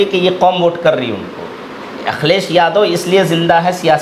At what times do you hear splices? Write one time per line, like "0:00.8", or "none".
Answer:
none